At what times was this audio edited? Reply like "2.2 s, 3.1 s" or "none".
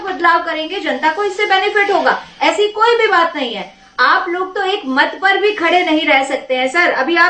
none